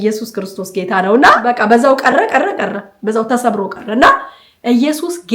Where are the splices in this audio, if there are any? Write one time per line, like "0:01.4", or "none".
0:01.5